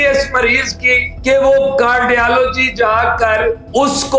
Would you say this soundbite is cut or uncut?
cut